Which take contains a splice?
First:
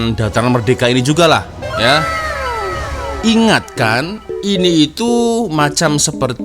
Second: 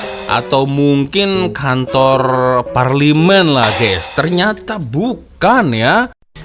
first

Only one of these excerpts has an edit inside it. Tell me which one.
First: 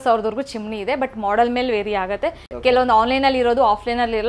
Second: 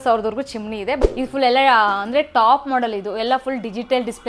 second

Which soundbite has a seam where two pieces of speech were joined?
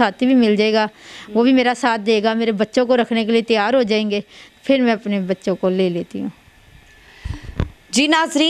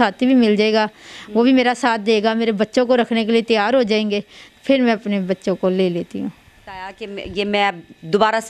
second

